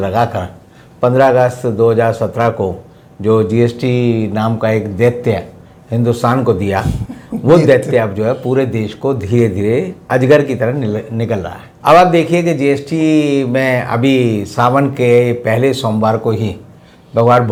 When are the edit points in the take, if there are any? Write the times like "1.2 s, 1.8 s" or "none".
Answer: none